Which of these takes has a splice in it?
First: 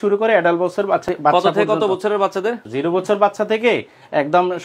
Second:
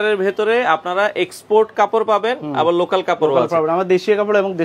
first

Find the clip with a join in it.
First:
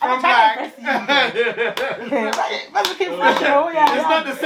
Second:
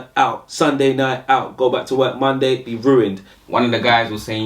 second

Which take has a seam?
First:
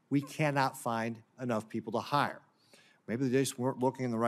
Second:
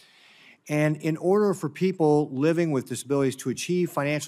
second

